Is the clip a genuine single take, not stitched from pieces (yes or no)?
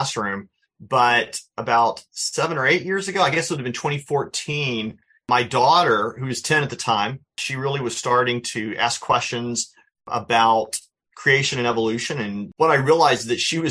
no